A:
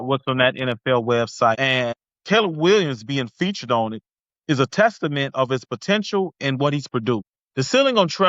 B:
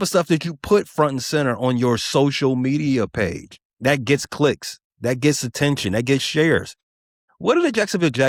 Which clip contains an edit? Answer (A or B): A